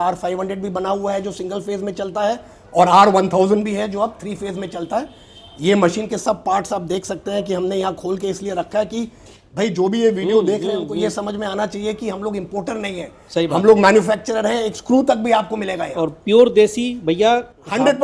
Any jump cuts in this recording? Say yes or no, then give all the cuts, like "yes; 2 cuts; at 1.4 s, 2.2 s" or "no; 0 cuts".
no; 0 cuts